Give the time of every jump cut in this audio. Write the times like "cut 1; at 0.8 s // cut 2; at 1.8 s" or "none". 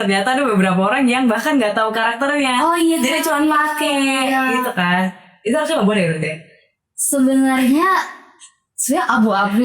none